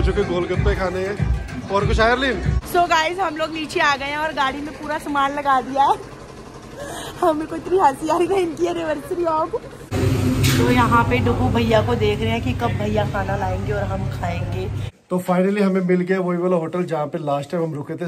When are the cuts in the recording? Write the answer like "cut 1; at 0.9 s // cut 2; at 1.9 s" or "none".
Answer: cut 1; at 2.6 s // cut 2; at 10.0 s // cut 3; at 14.9 s